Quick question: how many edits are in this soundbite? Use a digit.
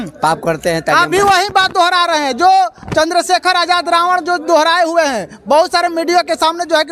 0